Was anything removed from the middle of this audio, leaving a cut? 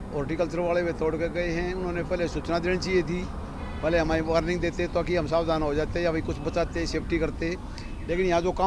no; 0 cuts

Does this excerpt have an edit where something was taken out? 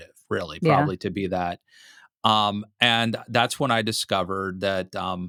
no; 0 cuts

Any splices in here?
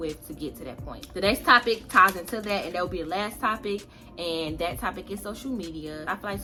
no; 0 cuts

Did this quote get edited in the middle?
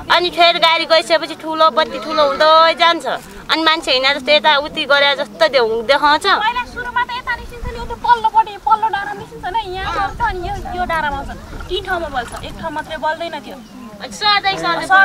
no; 0 cuts

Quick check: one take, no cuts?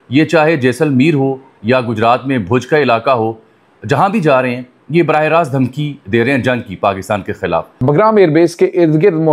no; 1 cut; at 7.8 s

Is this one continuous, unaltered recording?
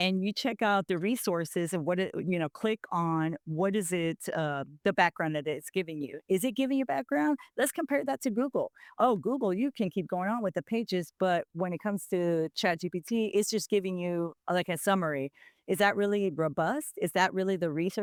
yes; 0 cuts

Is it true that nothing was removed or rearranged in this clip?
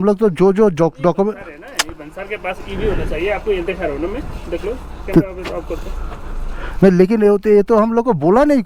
yes; 0 cuts

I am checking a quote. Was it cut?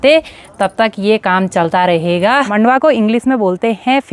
yes; 1 cut; at 2.5 s

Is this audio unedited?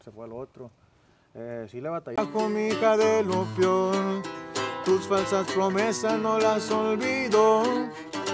no; 1 cut; at 2.2 s

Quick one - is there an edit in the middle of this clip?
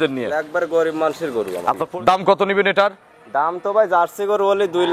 yes; 1 cut; at 1.8 s

